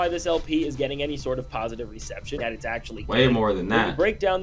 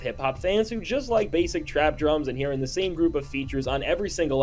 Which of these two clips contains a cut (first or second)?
first